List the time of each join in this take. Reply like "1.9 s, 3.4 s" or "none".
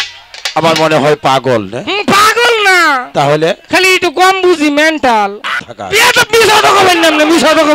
5.6 s